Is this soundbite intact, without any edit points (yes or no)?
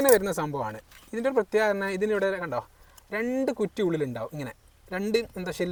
yes